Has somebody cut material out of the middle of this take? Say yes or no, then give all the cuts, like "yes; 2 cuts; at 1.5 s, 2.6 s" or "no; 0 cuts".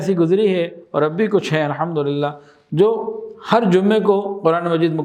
no; 0 cuts